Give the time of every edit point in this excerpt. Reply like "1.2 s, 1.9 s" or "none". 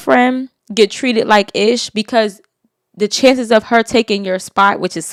none